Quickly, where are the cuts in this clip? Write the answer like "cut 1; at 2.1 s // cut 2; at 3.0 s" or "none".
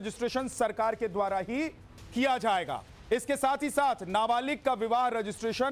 none

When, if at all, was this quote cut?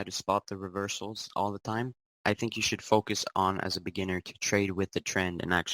cut 1; at 2.0 s

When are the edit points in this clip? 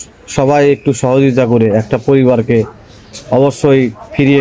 none

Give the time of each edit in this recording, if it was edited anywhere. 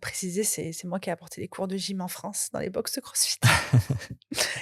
none

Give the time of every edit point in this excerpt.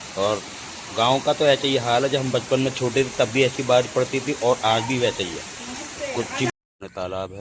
cut 1; at 6.5 s

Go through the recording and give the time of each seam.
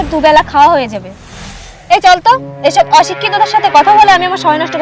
none

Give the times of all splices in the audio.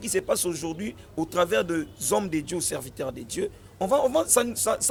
none

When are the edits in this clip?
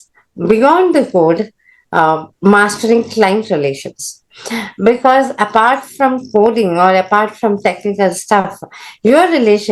none

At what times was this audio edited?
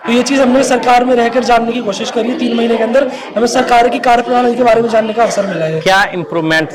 none

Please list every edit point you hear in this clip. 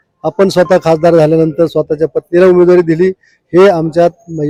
none

